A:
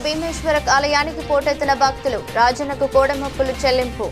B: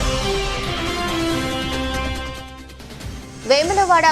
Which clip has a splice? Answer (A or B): B